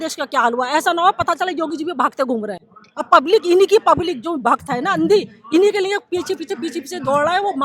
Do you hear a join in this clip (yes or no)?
no